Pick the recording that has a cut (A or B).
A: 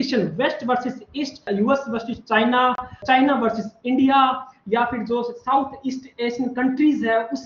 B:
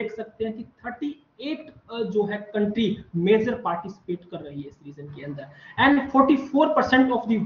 A